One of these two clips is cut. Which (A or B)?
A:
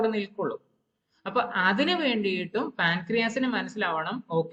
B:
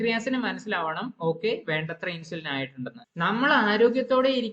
B